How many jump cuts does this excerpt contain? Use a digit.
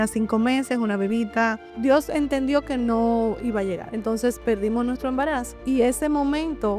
3